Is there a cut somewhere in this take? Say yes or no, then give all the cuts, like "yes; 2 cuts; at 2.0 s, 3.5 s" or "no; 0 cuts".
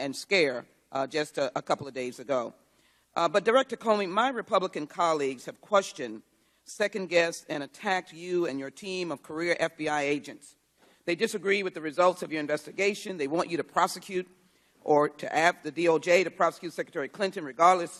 no; 0 cuts